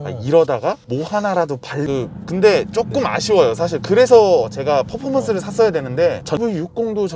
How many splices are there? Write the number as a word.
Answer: two